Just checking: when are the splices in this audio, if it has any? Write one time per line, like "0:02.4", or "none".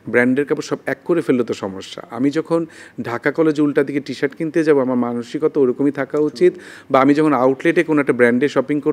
none